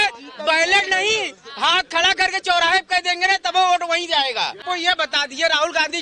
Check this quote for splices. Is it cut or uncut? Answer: cut